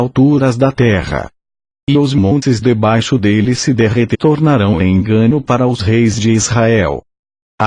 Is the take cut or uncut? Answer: uncut